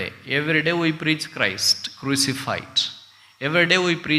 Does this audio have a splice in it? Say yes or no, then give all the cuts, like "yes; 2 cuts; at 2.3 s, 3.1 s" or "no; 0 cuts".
no; 0 cuts